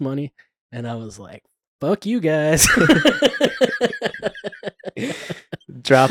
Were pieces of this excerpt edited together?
no; 0 cuts

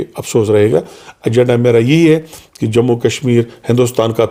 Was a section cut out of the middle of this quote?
no; 0 cuts

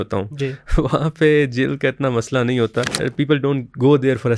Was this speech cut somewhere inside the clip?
yes; 1 cut; at 2.9 s

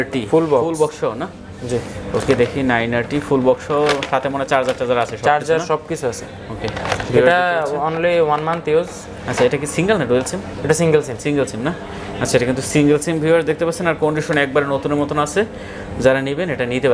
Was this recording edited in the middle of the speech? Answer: no; 0 cuts

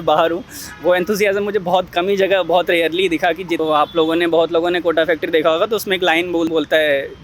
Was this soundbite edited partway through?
yes; 2 cuts; at 3.6 s, 6.5 s

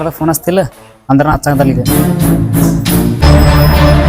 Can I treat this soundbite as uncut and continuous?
no; 1 cut; at 3.2 s

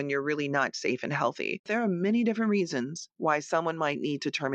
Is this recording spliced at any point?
yes; 1 cut; at 1.7 s

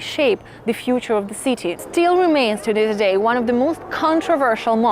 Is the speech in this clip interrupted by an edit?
yes; 1 cut; at 1.8 s

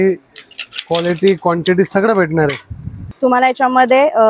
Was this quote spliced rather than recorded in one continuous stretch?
yes; 1 cut; at 3.0 s

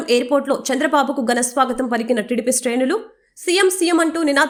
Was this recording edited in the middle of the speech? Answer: no; 0 cuts

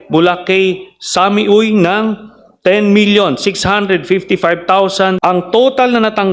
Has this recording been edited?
yes; 1 cut; at 5.2 s

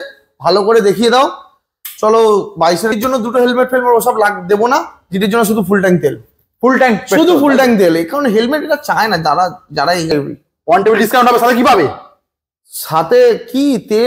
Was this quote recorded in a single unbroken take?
no; 2 cuts; at 2.9 s, 10.1 s

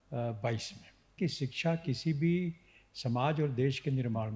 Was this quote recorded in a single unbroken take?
no; 1 cut; at 1.2 s

